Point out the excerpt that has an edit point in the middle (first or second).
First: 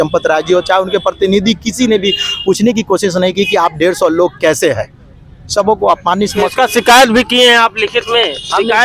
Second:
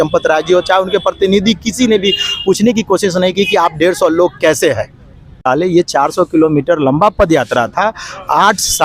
second